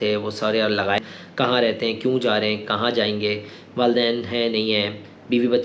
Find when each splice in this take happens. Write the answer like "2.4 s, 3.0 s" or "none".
1.0 s